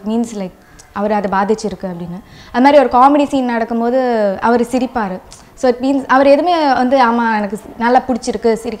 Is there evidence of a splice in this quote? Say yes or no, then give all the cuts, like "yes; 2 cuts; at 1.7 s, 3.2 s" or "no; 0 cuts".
no; 0 cuts